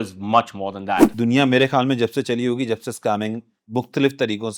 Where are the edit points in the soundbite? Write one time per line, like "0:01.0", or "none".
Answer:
0:01.1